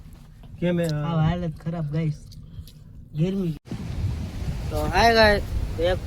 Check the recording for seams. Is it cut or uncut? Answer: cut